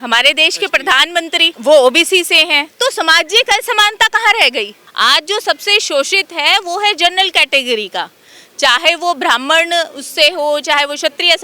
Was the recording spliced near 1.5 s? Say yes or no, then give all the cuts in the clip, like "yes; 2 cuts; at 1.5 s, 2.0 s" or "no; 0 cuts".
yes; 2 cuts; at 1.5 s, 4.8 s